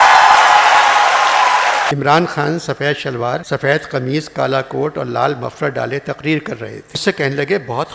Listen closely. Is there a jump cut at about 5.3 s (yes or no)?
no